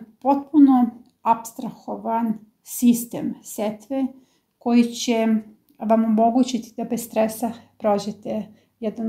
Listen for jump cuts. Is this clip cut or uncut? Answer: uncut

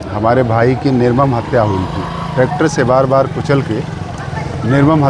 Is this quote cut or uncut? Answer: uncut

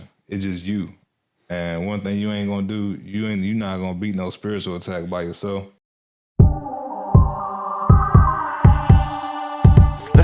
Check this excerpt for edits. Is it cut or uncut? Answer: cut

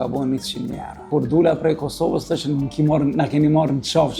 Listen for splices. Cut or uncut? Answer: cut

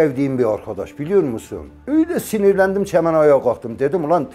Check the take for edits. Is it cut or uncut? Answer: uncut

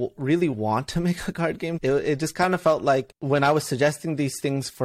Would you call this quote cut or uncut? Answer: cut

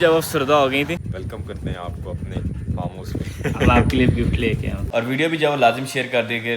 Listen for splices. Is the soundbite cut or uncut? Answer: cut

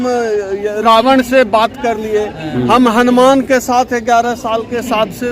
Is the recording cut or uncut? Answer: uncut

